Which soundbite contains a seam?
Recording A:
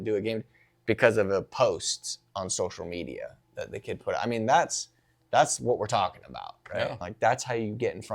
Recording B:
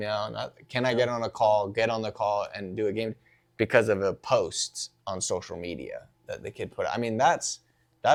A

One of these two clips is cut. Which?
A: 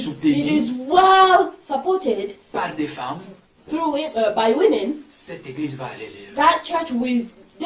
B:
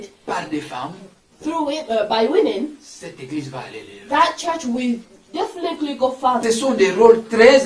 B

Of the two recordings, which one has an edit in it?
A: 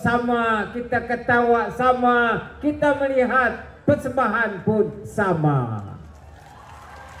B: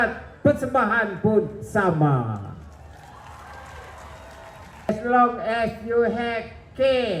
B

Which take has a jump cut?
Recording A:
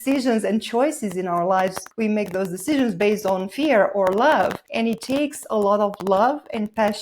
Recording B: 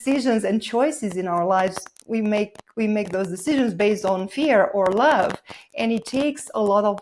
A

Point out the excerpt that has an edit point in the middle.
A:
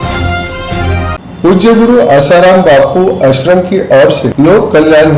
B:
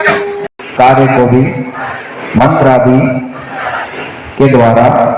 A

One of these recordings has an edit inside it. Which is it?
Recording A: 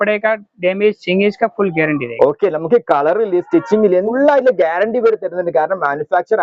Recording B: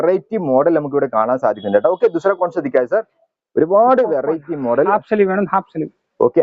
A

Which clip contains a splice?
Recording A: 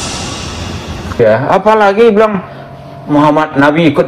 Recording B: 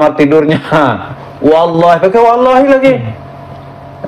A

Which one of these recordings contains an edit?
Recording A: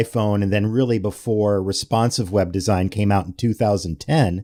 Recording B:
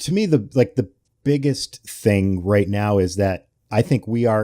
B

